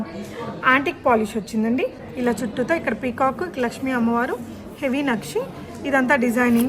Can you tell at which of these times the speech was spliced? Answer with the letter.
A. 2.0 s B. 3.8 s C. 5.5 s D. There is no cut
A